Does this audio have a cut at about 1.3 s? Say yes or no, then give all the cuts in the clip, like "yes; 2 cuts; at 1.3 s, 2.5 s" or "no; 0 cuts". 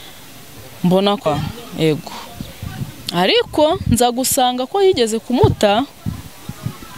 yes; 1 cut; at 1.3 s